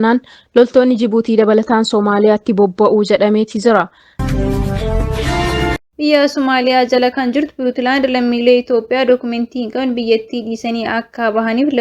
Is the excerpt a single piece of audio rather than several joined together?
no; 2 cuts; at 4.1 s, 5.8 s

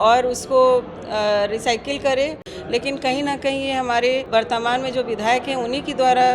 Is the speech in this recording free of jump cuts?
no; 2 cuts; at 2.5 s, 4.2 s

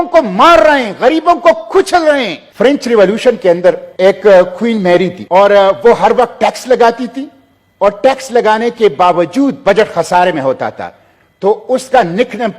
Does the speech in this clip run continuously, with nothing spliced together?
no; 3 cuts; at 2.4 s, 3.9 s, 5.2 s

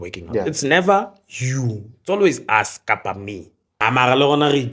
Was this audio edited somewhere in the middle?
yes; 1 cut; at 3.7 s

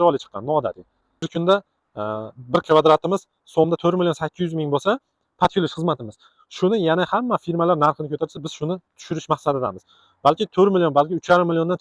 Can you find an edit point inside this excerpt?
yes; 1 cut; at 1.3 s

